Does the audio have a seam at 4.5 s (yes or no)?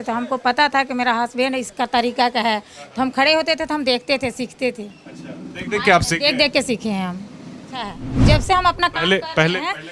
no